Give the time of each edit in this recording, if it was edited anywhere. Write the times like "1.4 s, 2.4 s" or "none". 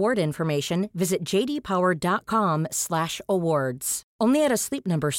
none